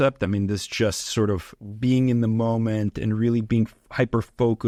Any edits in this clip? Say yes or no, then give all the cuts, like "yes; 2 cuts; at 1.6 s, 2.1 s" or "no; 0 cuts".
no; 0 cuts